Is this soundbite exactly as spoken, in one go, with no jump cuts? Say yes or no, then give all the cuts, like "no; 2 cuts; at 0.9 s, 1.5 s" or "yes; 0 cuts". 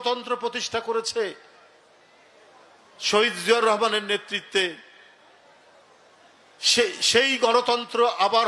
yes; 0 cuts